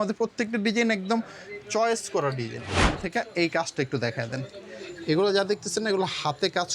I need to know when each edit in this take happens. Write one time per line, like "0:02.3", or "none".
0:02.8